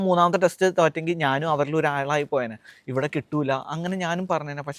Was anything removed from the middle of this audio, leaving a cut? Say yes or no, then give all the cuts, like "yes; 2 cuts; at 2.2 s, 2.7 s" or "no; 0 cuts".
no; 0 cuts